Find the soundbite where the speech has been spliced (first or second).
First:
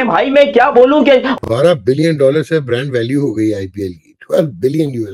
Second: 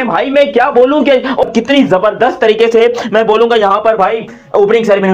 first